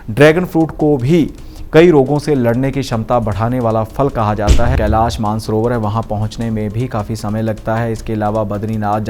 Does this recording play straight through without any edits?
no; 1 cut; at 4.7 s

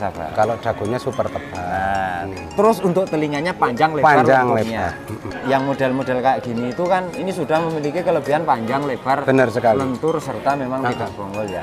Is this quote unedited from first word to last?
no; 1 cut; at 5.3 s

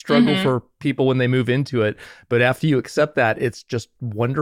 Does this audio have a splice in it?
no; 0 cuts

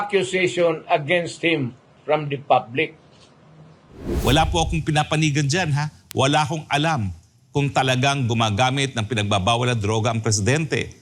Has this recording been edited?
yes; 1 cut; at 4.2 s

